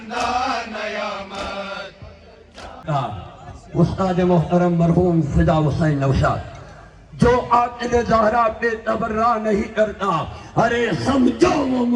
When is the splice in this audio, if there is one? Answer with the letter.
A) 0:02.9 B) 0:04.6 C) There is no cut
A